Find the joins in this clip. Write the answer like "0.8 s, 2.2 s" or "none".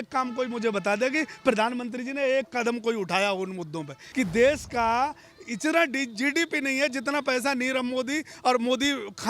4.0 s